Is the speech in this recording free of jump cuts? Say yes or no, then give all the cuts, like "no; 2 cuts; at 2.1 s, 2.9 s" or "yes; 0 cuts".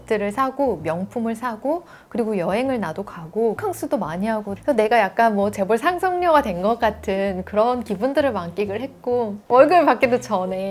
yes; 0 cuts